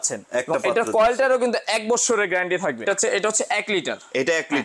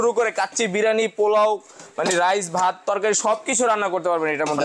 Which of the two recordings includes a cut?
first; 1 cut; at 2.8 s

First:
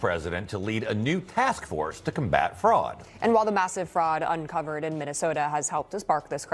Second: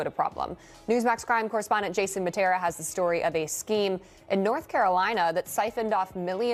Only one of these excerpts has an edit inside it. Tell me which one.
first; 1 cut; at 3.0 s

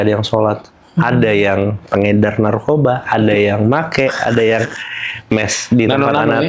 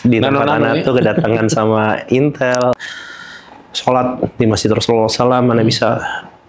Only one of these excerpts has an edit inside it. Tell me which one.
second; 1 cut; at 2.7 s

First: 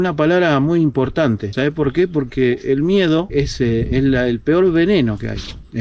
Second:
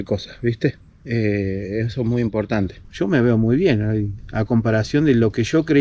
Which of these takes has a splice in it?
second; 1 cut; at 2.8 s

